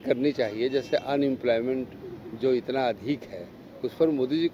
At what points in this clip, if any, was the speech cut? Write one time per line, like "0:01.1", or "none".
none